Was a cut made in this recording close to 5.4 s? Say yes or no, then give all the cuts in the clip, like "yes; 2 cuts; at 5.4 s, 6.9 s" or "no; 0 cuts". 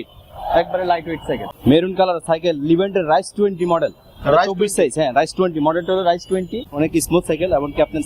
no; 2 cuts; at 1.5 s, 6.6 s